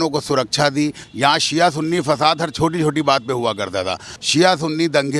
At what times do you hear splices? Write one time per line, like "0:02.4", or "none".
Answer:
0:01.0
0:04.1